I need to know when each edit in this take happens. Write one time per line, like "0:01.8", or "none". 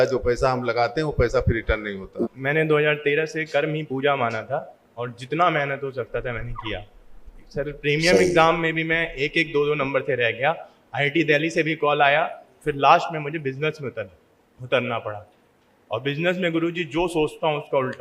0:02.2